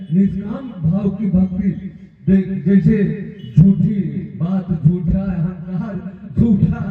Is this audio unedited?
yes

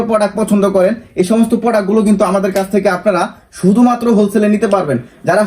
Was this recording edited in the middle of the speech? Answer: no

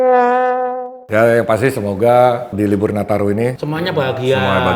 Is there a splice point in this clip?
yes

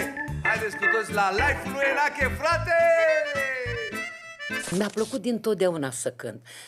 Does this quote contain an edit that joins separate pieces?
yes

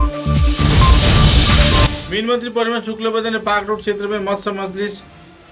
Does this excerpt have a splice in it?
no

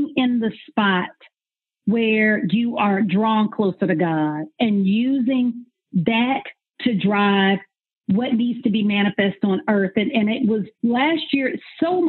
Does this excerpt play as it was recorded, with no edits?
no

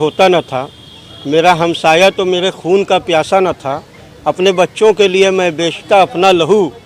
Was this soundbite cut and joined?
no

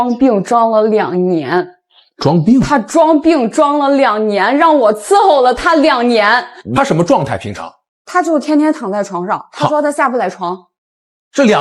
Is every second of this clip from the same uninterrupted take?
no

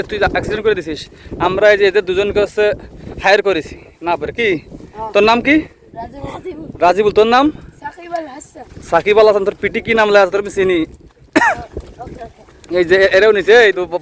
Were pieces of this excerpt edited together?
no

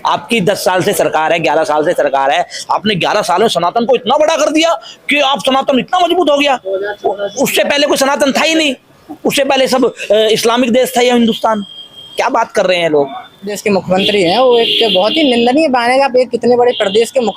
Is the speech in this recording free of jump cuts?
no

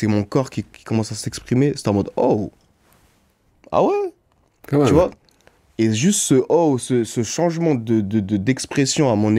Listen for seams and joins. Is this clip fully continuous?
yes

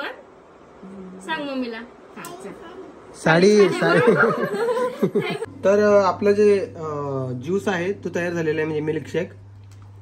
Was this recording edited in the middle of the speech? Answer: yes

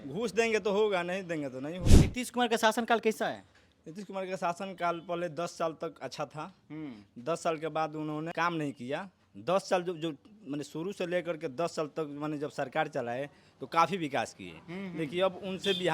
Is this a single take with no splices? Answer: no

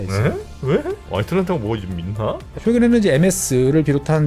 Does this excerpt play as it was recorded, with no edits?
no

